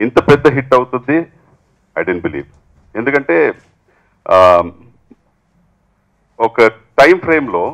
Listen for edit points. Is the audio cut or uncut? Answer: uncut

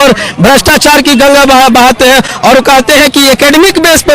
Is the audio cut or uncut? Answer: uncut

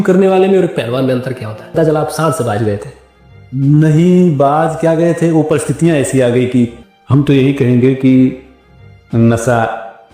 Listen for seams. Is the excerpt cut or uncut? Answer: cut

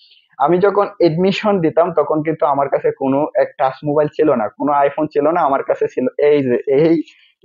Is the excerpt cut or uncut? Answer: uncut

